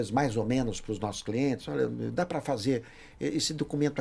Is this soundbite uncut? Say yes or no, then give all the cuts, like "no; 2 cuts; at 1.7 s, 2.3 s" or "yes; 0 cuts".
yes; 0 cuts